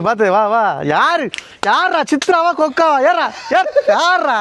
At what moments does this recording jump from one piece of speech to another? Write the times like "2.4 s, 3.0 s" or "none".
none